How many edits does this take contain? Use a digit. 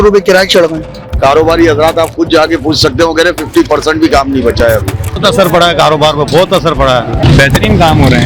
3